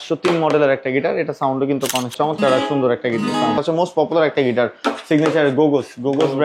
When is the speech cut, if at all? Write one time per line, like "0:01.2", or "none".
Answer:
0:02.1
0:03.6